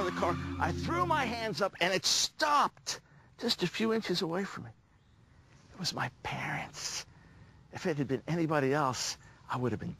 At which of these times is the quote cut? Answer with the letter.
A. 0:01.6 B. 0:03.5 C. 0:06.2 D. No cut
A